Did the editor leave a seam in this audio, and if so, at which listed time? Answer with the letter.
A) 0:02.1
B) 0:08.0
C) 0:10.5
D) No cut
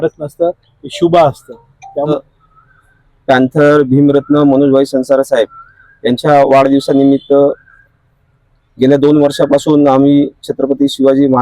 A